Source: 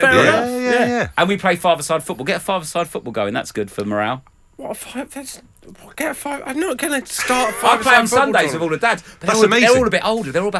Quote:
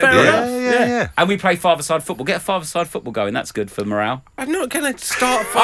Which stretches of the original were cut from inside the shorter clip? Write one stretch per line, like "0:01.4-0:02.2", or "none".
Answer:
0:04.4-0:06.4